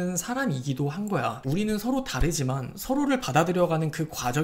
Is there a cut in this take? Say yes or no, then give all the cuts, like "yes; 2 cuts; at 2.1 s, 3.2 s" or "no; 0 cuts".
yes; 1 cut; at 1.3 s